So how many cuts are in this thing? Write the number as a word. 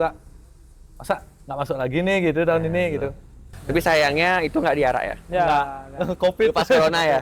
one